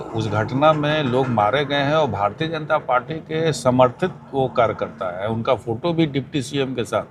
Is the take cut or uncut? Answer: uncut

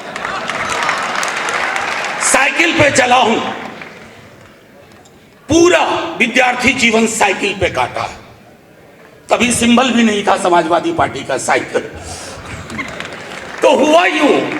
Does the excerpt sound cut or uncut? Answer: uncut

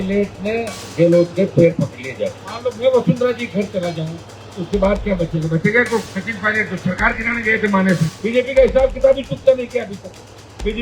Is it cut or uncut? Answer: cut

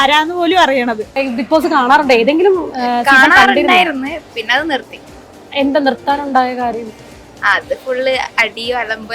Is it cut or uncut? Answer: cut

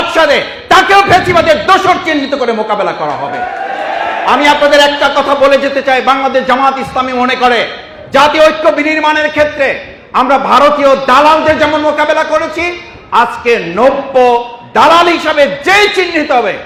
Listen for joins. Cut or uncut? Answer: uncut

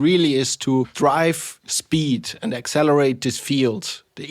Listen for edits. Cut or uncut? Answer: cut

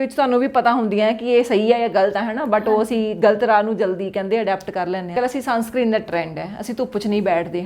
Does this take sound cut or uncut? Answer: cut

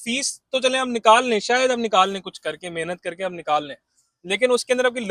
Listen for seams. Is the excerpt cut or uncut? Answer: uncut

